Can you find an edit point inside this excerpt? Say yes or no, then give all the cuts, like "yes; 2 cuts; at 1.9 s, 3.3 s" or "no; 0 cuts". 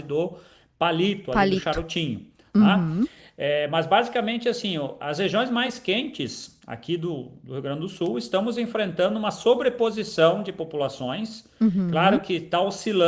no; 0 cuts